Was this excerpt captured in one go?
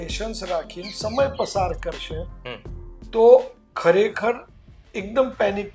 yes; 0 cuts

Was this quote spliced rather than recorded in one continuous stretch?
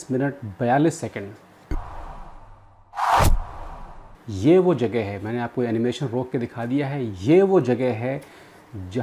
no; 0 cuts

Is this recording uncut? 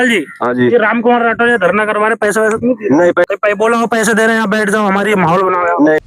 no; 1 cut; at 3.2 s

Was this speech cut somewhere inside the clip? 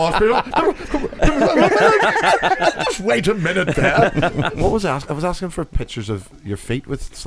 yes; 1 cut; at 4.5 s

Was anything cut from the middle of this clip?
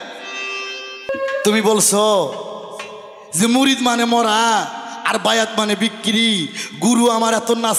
yes; 1 cut; at 1.1 s

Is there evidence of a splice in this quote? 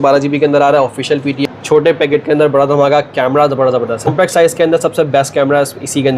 yes; 2 cuts; at 1.4 s, 4.1 s

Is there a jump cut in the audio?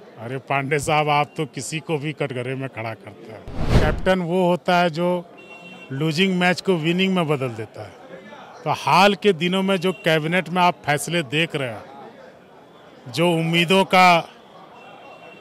yes; 1 cut; at 3.6 s

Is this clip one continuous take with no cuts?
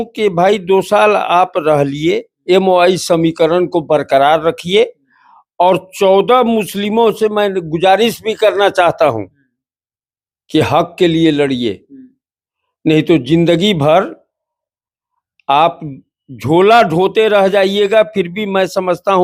yes; 0 cuts

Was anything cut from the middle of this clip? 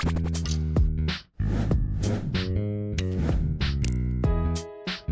no; 0 cuts

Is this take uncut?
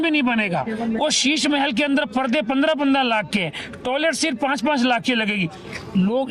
yes; 0 cuts

